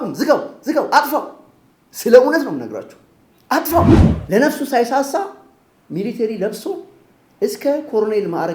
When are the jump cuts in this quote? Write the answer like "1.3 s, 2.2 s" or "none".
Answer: 4.1 s